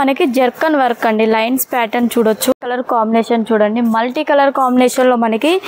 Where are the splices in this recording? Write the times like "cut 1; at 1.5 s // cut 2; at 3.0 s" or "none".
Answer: cut 1; at 2.5 s